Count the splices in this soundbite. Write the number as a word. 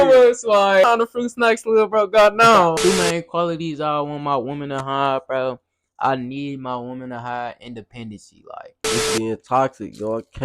three